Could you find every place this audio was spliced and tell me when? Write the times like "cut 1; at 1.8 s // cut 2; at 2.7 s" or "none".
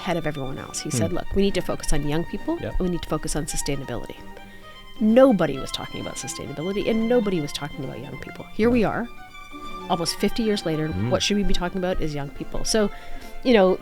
cut 1; at 2.7 s // cut 2; at 10.9 s